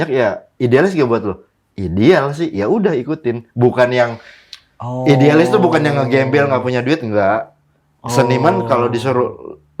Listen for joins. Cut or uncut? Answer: uncut